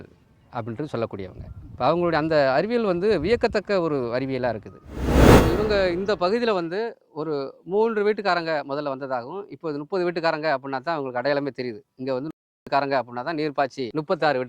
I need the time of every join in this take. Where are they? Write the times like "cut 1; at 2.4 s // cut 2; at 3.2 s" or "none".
cut 1; at 5.0 s // cut 2; at 5.6 s